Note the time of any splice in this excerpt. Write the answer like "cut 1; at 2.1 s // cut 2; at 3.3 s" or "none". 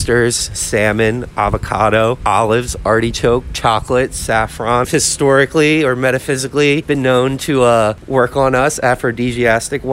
cut 1; at 4.9 s // cut 2; at 6.8 s